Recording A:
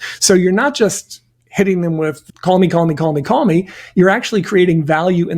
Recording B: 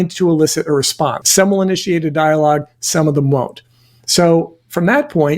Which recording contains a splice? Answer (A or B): B